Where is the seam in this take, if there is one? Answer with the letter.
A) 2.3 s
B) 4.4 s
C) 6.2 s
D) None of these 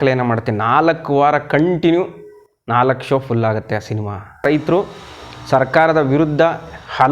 B